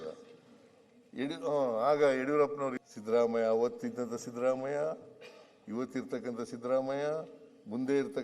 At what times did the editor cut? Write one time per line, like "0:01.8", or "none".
0:02.8